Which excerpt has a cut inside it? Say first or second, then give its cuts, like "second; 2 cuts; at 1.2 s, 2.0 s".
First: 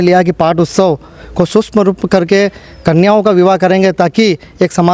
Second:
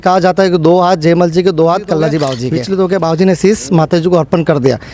second; 1 cut; at 2.5 s